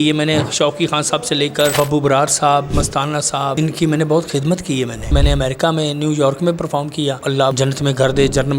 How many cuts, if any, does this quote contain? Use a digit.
4